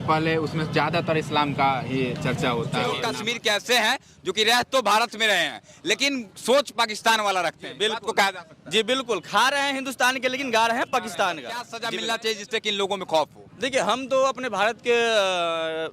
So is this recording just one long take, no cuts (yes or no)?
no